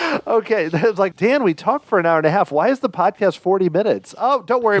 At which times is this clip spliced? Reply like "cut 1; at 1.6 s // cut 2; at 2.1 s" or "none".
cut 1; at 1.1 s